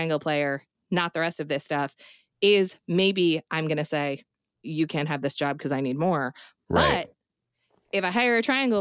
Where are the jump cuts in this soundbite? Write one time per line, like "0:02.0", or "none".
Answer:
0:04.5

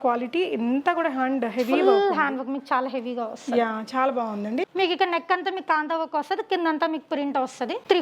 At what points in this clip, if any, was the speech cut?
0:04.7

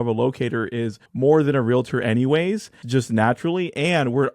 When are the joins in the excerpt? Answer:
0:01.0
0:02.8

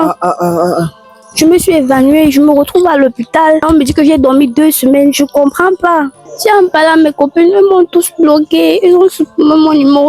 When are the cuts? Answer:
0:01.1
0:03.6
0:06.2

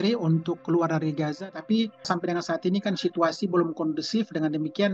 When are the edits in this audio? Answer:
0:01.5

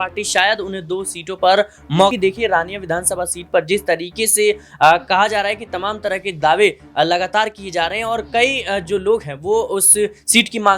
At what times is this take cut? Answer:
0:02.1

